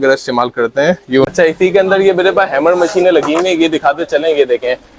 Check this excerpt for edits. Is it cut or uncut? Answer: cut